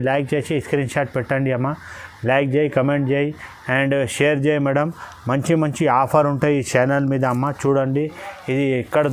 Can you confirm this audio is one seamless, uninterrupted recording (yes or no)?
yes